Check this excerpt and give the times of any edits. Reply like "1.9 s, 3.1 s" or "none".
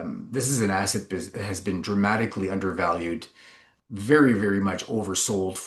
3.7 s